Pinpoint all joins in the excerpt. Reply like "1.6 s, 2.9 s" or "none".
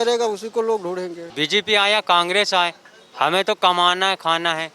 1.2 s